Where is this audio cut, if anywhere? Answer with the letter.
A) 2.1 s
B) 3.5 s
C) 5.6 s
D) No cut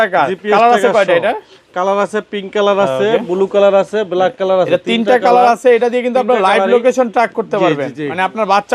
D